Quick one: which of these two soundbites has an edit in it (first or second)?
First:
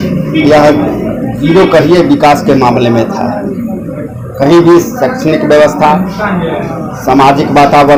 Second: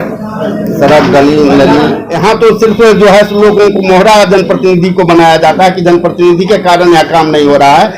second